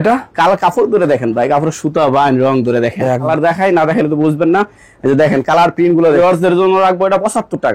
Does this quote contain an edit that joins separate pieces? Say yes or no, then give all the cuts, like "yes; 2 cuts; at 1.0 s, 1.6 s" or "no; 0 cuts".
yes; 2 cuts; at 3.3 s, 6.2 s